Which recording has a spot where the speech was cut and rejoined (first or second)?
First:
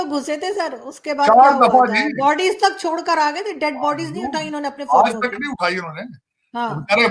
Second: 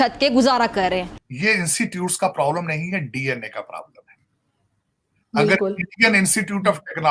second